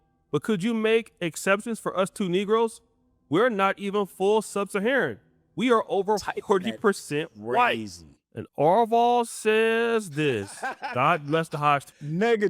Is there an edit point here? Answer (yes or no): no